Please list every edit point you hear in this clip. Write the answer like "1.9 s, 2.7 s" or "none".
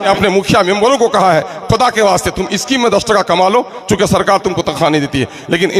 none